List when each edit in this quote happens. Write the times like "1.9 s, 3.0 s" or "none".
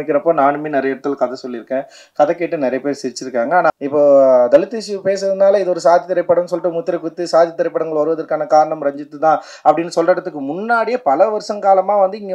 3.7 s